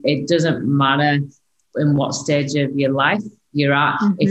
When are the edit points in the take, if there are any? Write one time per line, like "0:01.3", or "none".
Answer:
0:01.5